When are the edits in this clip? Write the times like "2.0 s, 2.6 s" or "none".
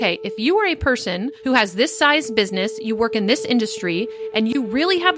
none